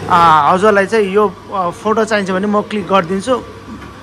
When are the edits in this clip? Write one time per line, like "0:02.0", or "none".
none